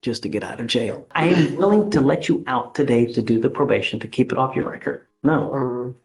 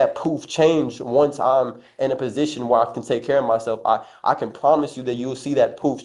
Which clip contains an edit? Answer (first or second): first